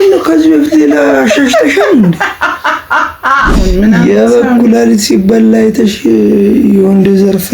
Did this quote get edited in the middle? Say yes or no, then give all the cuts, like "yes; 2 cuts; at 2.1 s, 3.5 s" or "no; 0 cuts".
yes; 1 cut; at 3.7 s